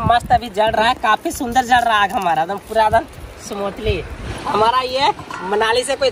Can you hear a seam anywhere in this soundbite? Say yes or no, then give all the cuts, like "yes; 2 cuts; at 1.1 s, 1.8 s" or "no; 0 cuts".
yes; 1 cut; at 4.2 s